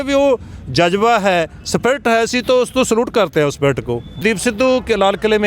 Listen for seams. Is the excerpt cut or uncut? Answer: cut